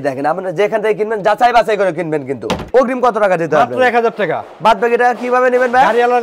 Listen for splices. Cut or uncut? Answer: cut